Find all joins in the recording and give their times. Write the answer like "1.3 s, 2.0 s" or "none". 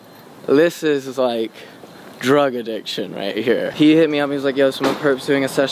3.7 s